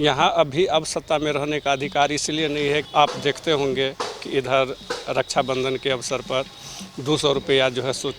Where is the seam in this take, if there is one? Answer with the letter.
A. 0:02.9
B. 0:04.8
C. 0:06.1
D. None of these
A